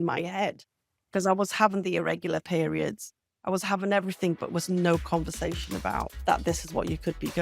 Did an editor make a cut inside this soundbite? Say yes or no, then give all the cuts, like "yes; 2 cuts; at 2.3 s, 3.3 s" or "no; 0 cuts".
yes; 1 cut; at 6.1 s